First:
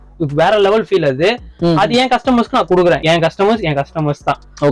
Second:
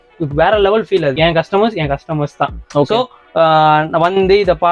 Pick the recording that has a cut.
second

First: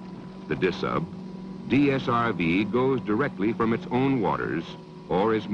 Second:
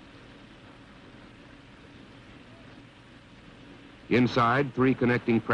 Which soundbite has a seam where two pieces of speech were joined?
second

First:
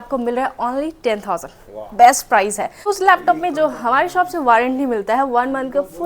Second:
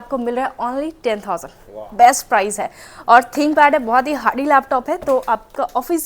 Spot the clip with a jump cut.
first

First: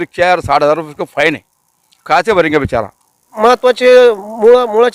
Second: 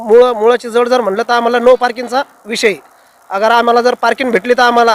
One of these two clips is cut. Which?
first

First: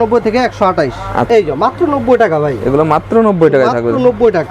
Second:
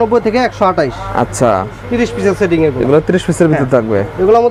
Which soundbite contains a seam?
first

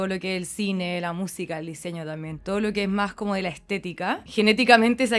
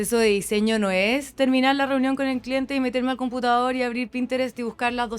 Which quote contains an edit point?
first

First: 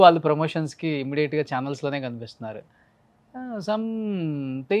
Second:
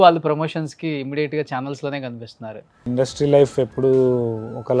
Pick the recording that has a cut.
second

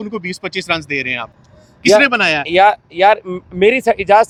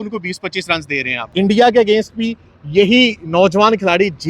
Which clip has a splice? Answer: second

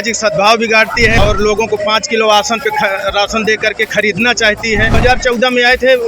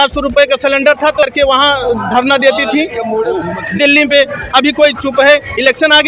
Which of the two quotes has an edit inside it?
first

